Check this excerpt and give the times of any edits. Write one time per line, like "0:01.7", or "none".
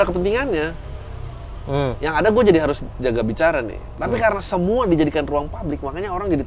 0:03.8